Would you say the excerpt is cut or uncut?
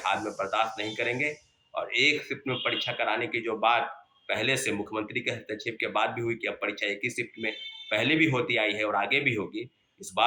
uncut